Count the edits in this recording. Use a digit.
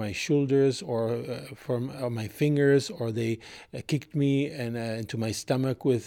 0